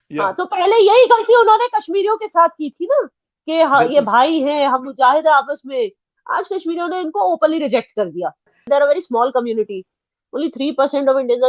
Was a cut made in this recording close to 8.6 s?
yes; 1 cut; at 8.6 s

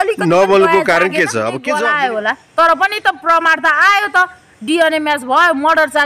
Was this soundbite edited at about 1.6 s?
yes; 1 cut; at 1.6 s

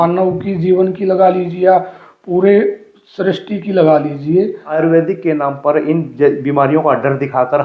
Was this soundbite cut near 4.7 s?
yes; 1 cut; at 4.7 s

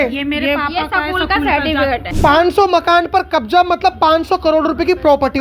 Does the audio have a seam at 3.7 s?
no; 1 cut; at 2.1 s

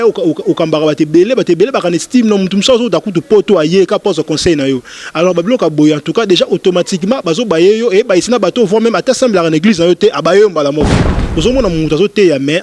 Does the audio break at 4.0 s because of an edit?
no; 1 cut; at 11.0 s

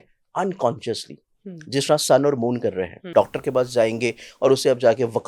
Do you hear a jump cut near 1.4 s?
no; 1 cut; at 3.0 s

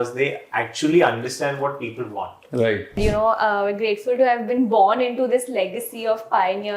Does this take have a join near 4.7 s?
no; 1 cut; at 3.0 s

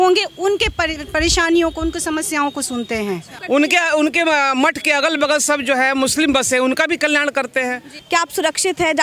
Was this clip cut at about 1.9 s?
no; 2 cuts; at 3.3 s, 7.9 s

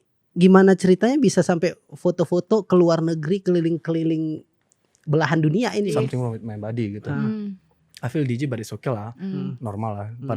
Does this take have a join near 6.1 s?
yes; 1 cut; at 6.1 s

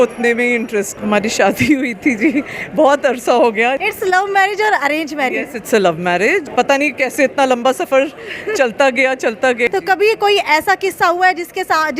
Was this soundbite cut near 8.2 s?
no; 4 cuts; at 0.9 s, 3.8 s, 6.5 s, 9.7 s

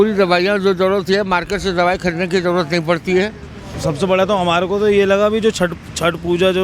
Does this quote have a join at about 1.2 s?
no; 1 cut; at 3.7 s

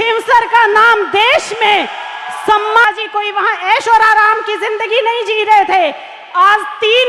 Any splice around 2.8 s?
yes; 1 cut; at 2.8 s

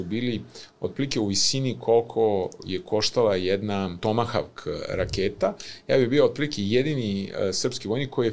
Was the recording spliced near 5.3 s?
no; 1 cut; at 4.0 s

